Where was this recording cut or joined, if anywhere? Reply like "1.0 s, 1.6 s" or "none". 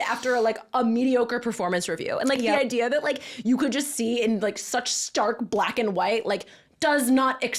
none